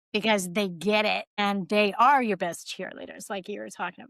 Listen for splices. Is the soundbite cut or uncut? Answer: cut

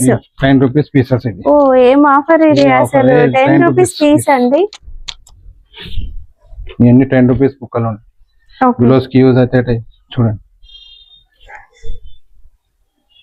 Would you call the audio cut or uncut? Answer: uncut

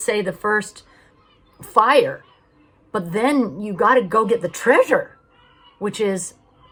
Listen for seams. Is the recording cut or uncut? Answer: uncut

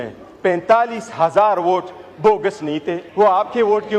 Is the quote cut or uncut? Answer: cut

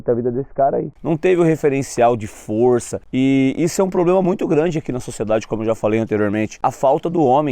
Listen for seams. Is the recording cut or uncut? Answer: cut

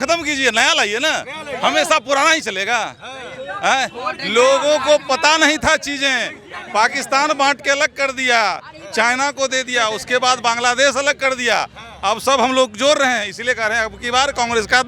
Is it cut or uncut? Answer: uncut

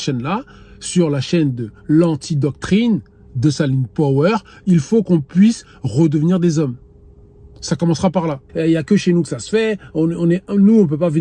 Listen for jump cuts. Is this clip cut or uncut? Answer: cut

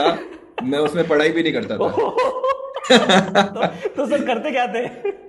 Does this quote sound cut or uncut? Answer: uncut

